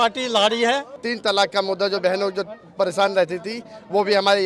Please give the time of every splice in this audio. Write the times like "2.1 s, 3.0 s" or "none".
1.0 s